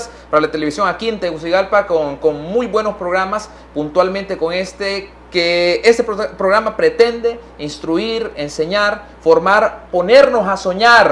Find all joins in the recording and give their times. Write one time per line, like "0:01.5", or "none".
none